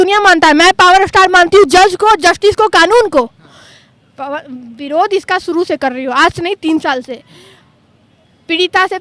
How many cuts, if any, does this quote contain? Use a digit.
0